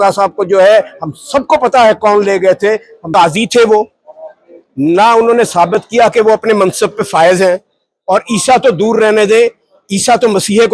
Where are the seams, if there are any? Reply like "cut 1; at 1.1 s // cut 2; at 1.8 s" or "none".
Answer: cut 1; at 3.0 s

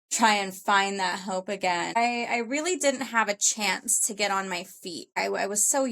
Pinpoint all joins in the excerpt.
cut 1; at 2.0 s // cut 2; at 5.1 s

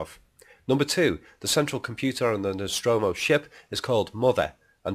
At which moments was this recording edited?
none

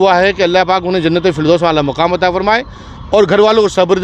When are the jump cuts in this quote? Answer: none

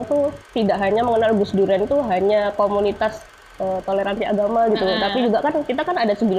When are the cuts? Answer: none

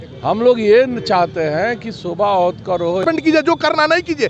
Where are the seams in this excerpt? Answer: cut 1; at 3.0 s

